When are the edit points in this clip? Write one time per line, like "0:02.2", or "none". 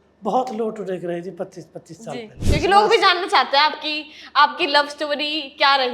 0:02.4